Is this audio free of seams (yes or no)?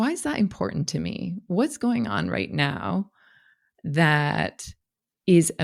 yes